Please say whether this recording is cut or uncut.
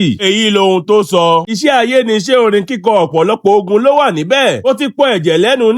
cut